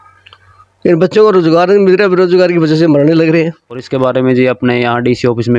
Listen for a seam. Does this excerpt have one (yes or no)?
yes